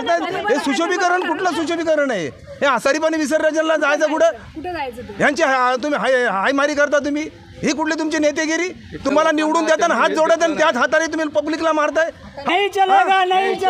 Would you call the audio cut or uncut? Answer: cut